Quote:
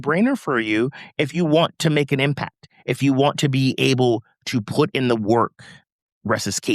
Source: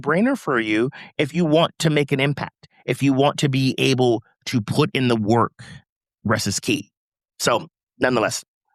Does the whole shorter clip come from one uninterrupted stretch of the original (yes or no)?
yes